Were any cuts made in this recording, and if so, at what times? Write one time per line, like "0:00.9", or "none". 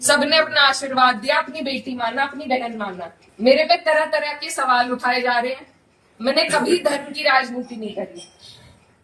0:03.2